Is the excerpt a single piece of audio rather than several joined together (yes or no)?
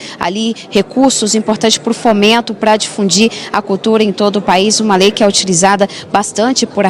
yes